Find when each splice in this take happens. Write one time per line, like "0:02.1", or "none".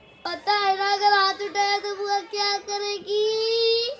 none